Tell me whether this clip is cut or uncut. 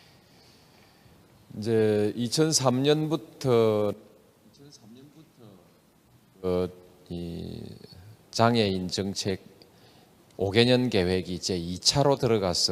cut